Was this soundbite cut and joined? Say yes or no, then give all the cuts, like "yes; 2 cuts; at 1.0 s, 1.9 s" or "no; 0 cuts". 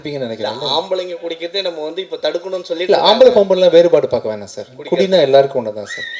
no; 0 cuts